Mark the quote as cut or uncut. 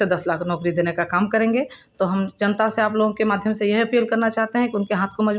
uncut